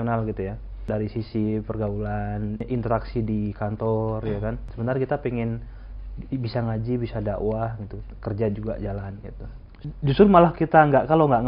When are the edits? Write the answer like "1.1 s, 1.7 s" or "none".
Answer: 0.9 s, 2.6 s, 4.7 s, 9.8 s